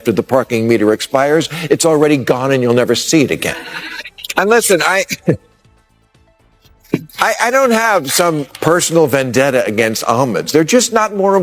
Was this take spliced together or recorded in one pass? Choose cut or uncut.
cut